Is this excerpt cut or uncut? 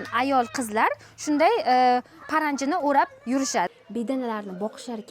cut